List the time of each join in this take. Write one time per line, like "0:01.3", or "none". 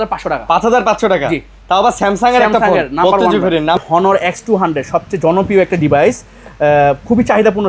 0:03.8